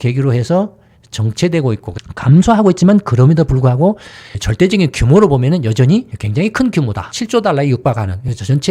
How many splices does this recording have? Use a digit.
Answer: 1